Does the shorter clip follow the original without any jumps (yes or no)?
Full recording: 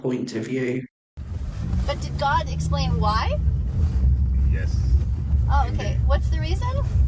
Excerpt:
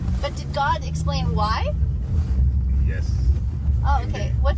yes